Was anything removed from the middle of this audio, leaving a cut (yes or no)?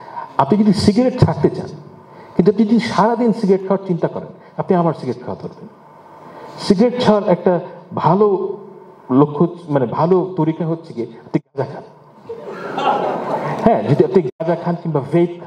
no